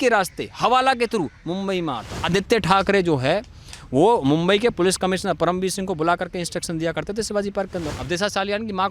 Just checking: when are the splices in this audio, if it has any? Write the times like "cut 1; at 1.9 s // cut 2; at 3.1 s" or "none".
cut 1; at 2.3 s // cut 2; at 7.8 s